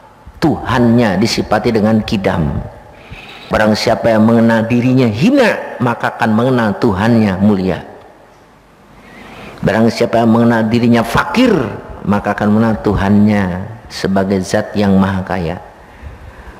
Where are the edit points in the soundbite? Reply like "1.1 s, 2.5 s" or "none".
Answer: 3.5 s